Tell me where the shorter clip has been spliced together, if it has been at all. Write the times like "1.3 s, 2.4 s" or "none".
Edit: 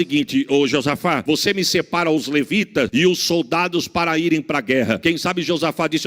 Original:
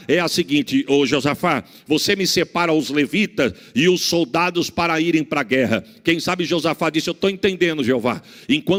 1.2 s, 2.9 s, 5.0 s